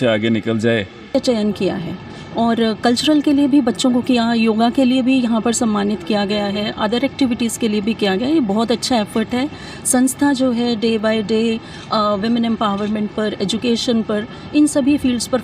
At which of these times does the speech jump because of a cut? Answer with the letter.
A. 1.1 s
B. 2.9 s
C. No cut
A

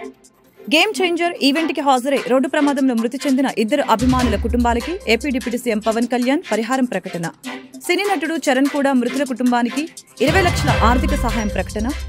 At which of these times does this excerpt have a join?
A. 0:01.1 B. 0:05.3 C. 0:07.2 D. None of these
D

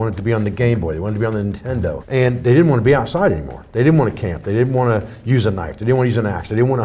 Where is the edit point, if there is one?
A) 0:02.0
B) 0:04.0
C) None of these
A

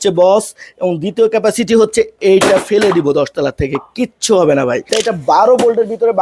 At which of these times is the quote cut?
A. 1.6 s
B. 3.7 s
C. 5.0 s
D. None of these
C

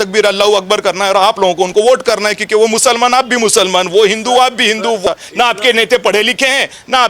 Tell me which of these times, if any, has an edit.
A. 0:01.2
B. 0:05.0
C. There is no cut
B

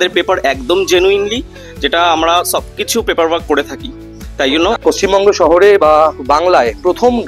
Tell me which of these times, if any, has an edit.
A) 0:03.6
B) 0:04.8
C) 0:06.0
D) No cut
B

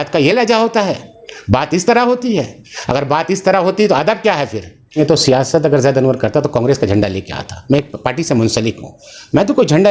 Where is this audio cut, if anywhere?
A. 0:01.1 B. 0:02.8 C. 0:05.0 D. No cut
C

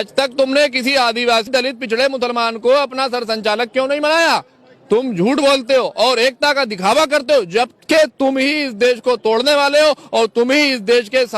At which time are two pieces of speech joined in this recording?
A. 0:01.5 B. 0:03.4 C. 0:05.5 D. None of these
A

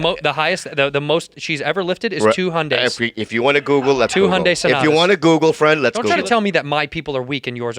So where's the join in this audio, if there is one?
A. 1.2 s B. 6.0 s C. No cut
B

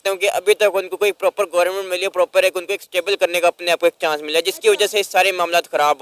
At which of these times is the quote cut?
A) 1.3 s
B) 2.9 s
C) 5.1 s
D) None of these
D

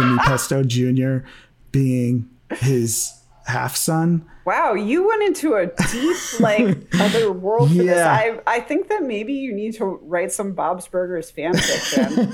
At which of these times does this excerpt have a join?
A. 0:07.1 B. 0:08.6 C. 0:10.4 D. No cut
A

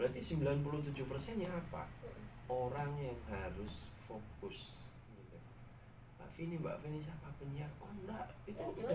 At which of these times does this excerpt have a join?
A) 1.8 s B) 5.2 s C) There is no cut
B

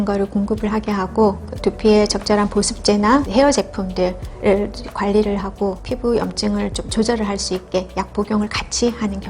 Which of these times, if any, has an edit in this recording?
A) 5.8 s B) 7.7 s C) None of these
A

